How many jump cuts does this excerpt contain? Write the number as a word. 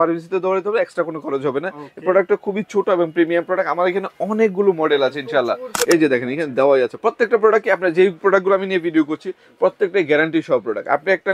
one